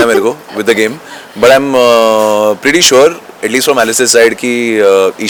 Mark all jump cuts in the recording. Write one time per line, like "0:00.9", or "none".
none